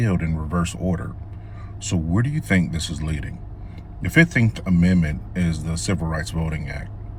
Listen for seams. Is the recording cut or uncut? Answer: uncut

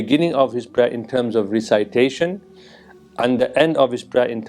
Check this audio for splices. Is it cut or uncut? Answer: uncut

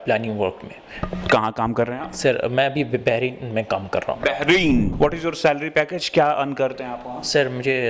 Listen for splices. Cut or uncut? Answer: cut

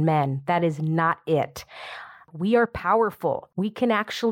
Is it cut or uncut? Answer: cut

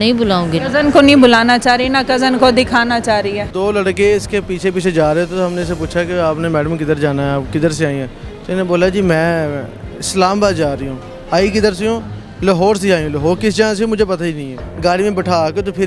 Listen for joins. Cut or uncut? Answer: cut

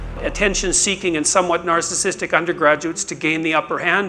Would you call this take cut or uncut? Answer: uncut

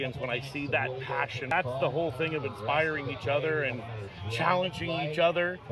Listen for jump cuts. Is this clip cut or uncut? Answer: cut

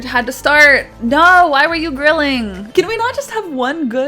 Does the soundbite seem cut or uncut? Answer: cut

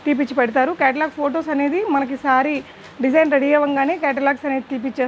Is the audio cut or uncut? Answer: uncut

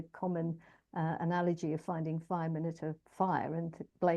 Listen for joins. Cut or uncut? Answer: uncut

